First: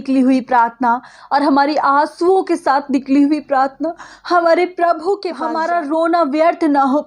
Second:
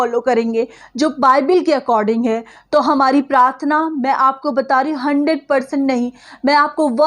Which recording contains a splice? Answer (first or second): first